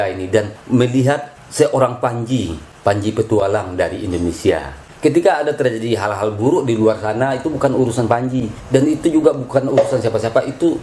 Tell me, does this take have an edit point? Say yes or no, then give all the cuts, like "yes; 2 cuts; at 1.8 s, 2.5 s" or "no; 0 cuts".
yes; 1 cut; at 4.9 s